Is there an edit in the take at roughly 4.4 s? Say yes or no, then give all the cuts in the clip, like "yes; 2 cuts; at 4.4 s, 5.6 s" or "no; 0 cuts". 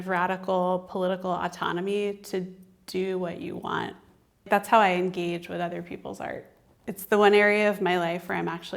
yes; 1 cut; at 4.4 s